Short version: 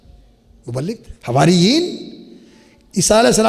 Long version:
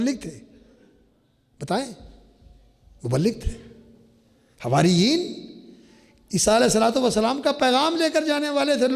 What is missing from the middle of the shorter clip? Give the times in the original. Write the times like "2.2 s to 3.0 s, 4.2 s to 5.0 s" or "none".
3.5 s to 4.5 s